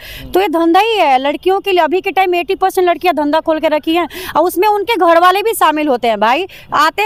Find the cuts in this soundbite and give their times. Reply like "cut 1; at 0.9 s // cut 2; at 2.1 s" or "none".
none